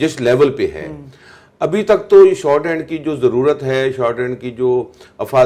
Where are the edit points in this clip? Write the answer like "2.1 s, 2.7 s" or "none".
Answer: none